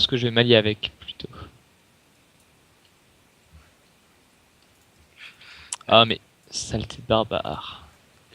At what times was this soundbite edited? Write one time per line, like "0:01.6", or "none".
0:02.3